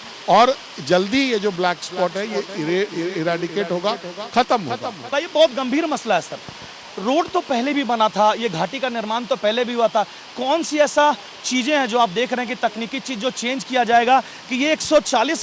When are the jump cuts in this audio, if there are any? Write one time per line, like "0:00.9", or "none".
0:05.1